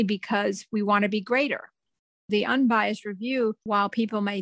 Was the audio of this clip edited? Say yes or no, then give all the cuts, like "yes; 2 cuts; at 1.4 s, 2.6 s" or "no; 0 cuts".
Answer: yes; 2 cuts; at 2.0 s, 3.6 s